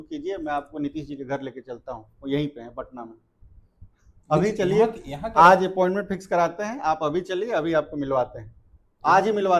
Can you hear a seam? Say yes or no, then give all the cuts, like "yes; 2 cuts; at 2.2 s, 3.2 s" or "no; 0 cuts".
no; 0 cuts